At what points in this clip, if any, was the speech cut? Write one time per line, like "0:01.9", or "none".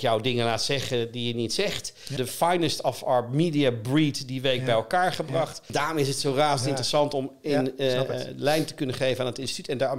0:02.1
0:05.7